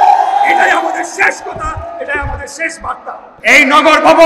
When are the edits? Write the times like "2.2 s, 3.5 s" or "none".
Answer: 3.3 s